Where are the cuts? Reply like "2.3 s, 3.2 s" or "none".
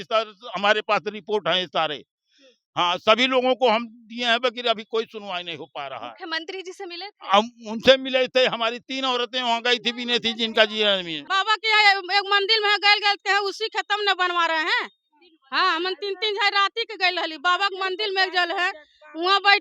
11.2 s